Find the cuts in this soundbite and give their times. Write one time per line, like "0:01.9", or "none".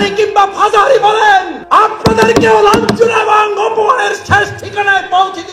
0:01.6